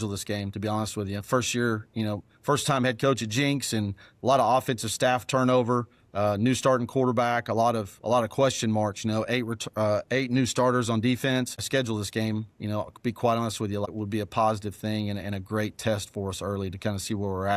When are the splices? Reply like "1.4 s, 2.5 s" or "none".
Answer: 11.6 s, 13.9 s